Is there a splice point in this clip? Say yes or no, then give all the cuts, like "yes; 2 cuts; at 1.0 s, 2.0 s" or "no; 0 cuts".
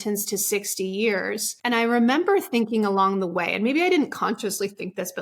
yes; 1 cut; at 1.5 s